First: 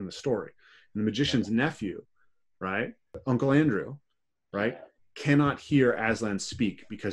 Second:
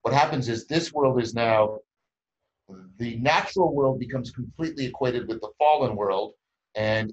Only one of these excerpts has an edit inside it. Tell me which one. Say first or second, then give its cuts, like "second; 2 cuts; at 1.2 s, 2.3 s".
first; 1 cut; at 3.2 s